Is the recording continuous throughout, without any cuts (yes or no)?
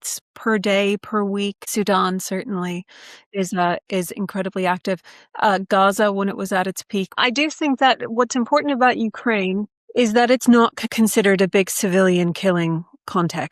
yes